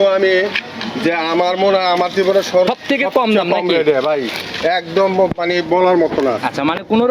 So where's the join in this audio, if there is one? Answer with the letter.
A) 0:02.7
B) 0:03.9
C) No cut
A